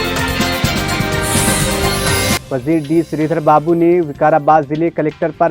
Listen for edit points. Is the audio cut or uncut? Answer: cut